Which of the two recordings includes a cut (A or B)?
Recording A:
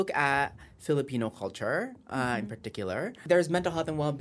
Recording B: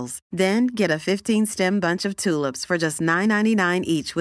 A